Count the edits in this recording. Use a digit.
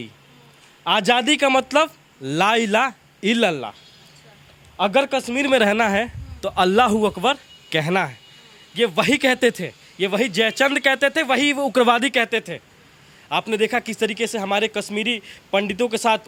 0